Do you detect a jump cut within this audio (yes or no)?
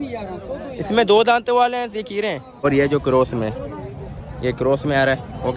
yes